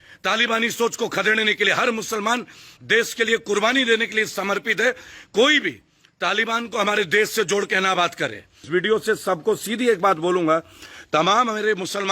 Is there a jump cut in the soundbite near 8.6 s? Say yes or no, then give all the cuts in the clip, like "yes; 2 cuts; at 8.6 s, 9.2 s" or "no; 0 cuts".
yes; 1 cut; at 8.6 s